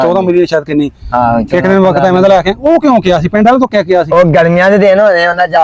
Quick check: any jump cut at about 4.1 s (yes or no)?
yes